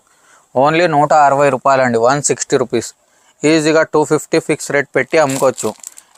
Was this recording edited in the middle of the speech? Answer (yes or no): no